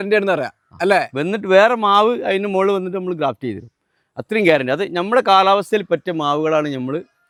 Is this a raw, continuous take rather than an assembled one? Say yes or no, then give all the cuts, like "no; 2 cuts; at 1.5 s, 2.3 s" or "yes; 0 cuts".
yes; 0 cuts